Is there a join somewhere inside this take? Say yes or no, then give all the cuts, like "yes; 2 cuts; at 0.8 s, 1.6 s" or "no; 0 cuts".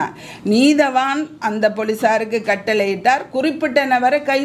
no; 0 cuts